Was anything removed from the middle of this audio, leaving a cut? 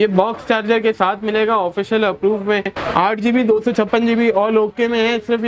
yes; 1 cut; at 2.8 s

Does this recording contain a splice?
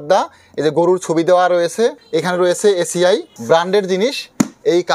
yes; 2 cuts; at 2.0 s, 3.3 s

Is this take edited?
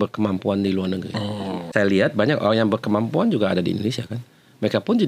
yes; 1 cut; at 1.7 s

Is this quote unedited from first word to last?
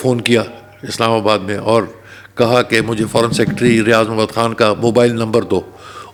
yes; 0 cuts

